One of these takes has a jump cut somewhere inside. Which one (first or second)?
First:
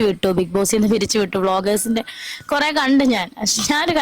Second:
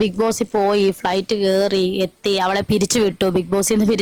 first